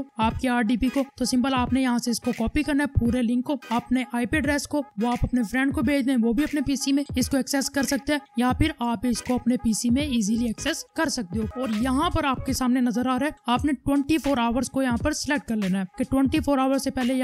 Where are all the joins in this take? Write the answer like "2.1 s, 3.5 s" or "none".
11.5 s